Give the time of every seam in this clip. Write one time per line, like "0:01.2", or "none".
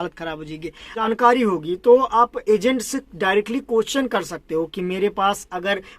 0:01.1